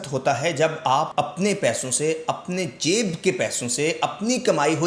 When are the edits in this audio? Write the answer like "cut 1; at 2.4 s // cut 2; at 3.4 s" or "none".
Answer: cut 1; at 1.1 s